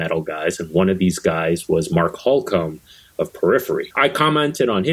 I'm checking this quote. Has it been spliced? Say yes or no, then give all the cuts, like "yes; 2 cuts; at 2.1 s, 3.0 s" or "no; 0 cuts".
yes; 1 cut; at 3.9 s